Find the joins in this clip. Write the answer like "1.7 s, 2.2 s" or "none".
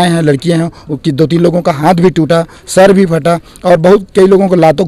none